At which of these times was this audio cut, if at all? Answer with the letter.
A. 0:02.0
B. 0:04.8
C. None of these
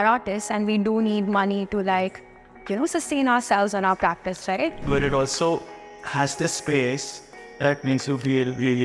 B